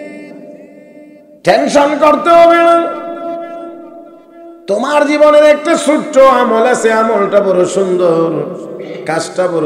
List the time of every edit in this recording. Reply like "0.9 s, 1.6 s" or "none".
1.2 s